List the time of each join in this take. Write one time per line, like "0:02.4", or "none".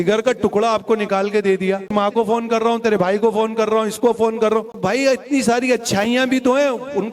0:01.9
0:04.8